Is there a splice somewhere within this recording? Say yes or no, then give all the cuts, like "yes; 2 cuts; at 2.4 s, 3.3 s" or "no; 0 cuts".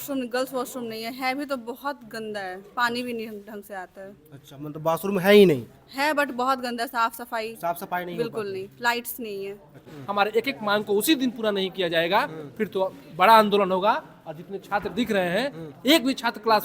yes; 1 cut; at 10.0 s